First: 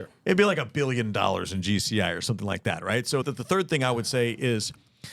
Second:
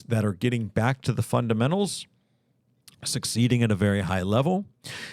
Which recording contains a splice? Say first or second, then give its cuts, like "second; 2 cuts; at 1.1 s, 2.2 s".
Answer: first; 1 cut; at 3.2 s